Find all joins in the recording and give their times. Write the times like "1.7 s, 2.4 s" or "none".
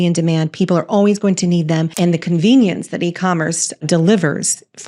1.9 s, 3.8 s